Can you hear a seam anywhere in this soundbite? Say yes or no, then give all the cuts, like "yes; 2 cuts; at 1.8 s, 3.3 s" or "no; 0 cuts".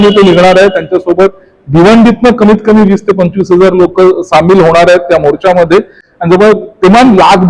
yes; 1 cut; at 6.0 s